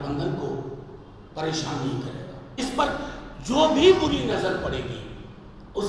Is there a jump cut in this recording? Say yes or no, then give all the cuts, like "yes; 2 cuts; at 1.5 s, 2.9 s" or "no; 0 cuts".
yes; 1 cut; at 2.6 s